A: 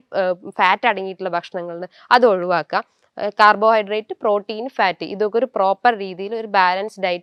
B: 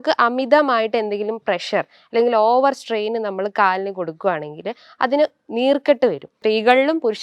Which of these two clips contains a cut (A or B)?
B